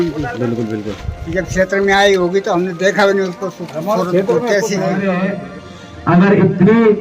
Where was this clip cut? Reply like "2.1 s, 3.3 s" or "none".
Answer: 5.1 s

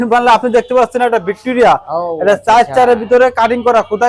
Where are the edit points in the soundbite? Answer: none

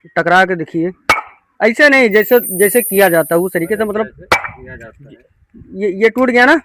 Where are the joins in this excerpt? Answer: none

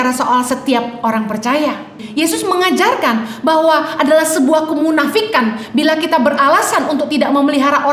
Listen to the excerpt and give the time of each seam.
2.0 s

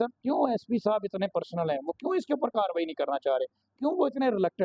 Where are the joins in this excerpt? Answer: none

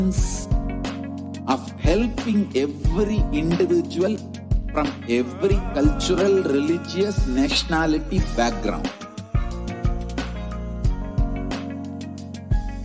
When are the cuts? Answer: 11.8 s

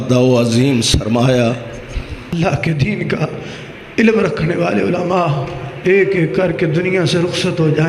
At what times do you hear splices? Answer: 2.3 s

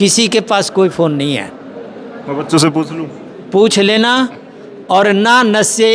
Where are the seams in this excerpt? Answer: none

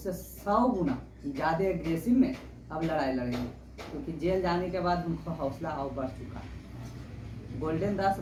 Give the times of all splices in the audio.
none

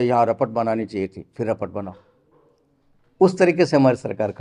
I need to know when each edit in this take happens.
none

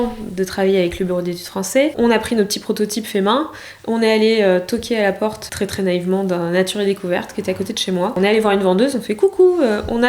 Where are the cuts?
1.9 s, 5.4 s, 8.2 s

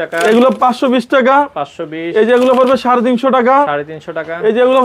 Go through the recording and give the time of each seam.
none

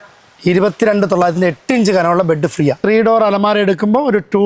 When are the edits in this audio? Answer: 2.8 s

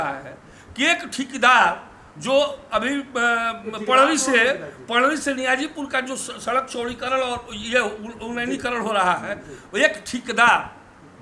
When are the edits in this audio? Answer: none

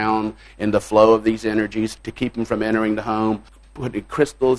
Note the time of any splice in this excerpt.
2.0 s, 3.5 s

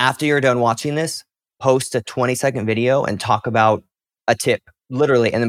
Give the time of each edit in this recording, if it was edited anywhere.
4.3 s

